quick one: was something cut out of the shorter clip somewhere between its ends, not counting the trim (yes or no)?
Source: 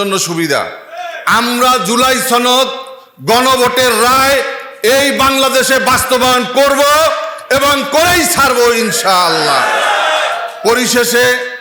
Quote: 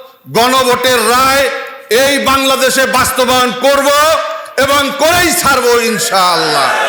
no